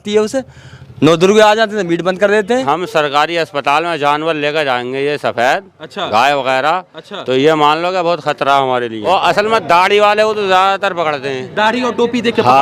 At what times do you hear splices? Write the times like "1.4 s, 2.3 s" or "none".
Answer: 2.6 s, 9.1 s, 11.4 s